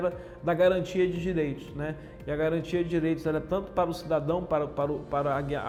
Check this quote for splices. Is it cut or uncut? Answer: uncut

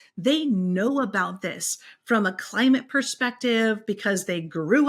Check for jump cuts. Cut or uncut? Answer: uncut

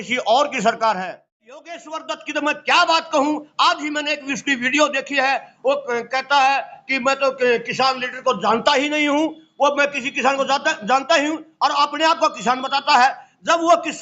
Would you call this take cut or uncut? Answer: cut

